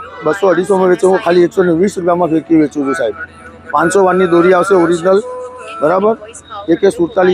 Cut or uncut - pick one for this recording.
uncut